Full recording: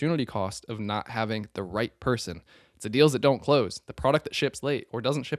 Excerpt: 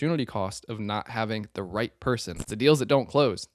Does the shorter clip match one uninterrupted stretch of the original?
no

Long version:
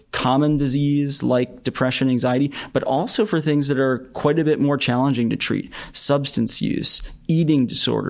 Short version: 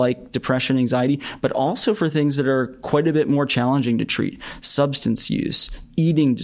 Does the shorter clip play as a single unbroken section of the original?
yes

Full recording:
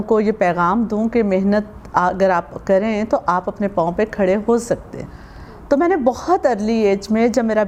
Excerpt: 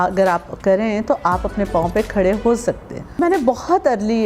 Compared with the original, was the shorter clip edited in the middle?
yes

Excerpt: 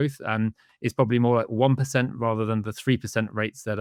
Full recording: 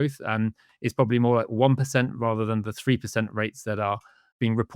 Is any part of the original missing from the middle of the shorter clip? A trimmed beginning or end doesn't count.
no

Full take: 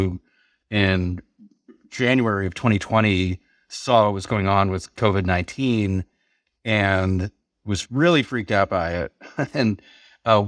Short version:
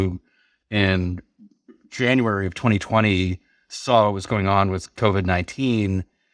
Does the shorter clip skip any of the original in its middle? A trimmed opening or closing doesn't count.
no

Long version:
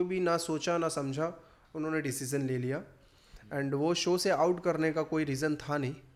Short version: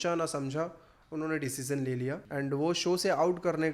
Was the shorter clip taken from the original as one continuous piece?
no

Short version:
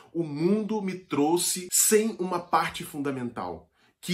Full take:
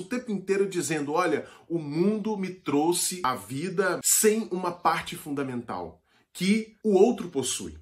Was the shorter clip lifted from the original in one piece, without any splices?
no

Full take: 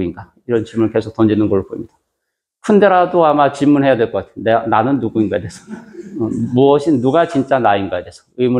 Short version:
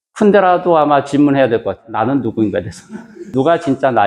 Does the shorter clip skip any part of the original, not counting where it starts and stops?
yes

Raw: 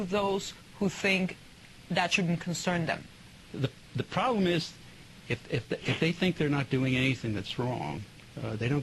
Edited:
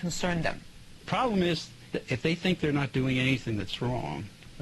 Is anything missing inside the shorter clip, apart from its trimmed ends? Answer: yes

